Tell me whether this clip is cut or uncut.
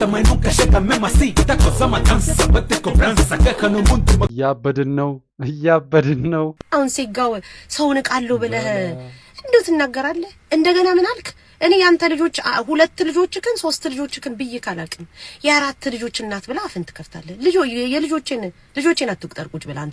uncut